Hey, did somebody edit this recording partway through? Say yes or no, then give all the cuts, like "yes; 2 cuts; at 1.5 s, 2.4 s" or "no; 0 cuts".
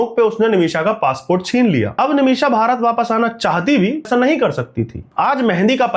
yes; 2 cuts; at 4.1 s, 5.0 s